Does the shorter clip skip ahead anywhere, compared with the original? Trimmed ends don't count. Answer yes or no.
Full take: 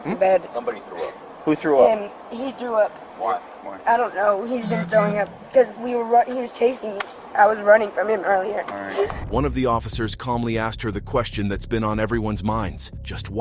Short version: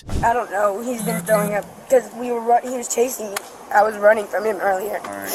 no